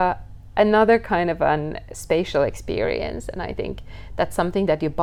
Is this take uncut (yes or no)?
yes